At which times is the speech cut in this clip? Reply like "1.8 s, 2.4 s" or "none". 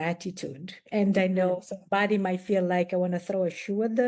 none

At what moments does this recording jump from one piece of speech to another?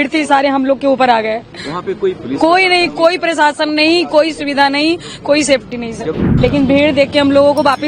6.2 s

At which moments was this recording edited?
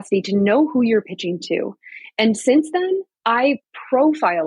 3.1 s

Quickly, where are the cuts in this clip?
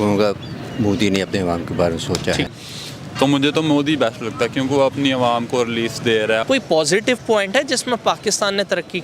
2.5 s, 6.4 s

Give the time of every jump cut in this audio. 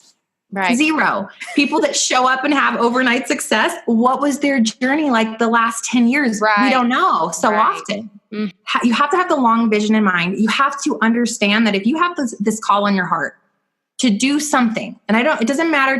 8.6 s

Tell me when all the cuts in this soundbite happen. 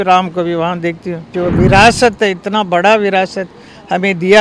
1.3 s

